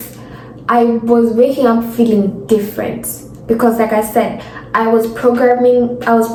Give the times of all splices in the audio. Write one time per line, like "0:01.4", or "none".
none